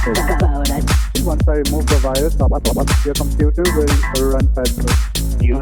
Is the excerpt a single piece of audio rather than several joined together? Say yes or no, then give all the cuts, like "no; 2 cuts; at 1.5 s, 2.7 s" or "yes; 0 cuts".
yes; 0 cuts